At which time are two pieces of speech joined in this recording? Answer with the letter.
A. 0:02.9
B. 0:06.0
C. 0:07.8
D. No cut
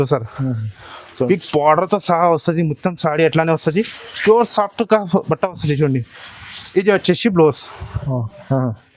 D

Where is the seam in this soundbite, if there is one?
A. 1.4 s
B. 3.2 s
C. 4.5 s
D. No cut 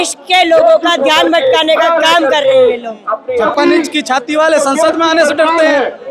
B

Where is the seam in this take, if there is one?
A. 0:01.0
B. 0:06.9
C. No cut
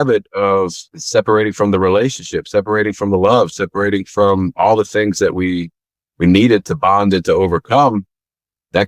A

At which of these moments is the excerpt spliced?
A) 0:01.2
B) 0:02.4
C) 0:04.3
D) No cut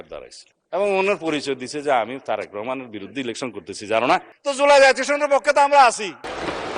C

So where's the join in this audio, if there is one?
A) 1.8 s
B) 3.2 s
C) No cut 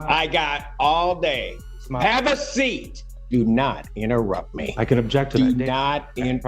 B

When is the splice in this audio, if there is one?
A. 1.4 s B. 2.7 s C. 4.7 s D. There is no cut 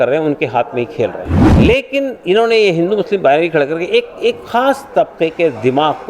A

